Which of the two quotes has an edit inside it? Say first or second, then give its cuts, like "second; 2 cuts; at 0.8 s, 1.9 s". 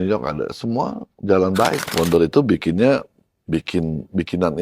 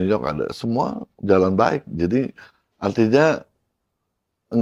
first; 1 cut; at 1.9 s